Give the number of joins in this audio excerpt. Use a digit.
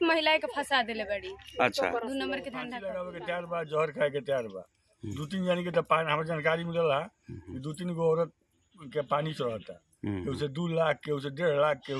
1